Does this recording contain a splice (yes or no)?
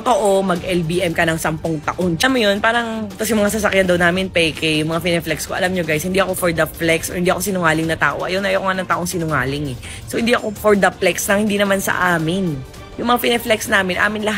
no